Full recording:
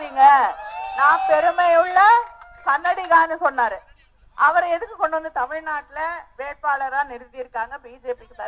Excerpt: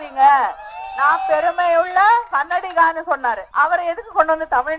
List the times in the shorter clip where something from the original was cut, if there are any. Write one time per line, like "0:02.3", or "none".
0:02.3
0:03.4